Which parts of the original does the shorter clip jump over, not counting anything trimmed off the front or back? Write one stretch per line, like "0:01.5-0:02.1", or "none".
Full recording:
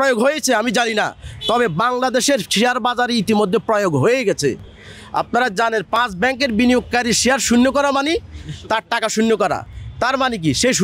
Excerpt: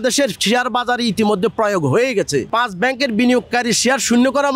0:04.7-0:06.0